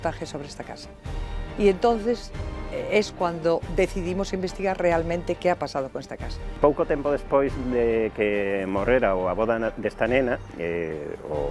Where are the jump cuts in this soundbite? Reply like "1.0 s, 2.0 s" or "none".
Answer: 6.6 s